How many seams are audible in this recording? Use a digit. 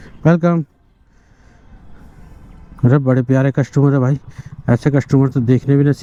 0